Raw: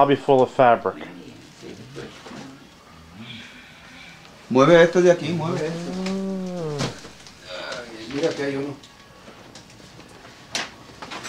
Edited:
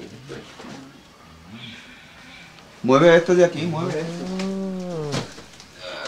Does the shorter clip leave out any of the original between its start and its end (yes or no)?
no